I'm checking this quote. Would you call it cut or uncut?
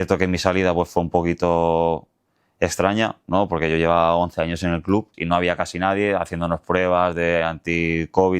cut